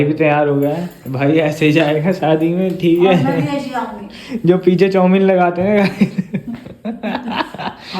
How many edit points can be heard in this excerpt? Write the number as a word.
zero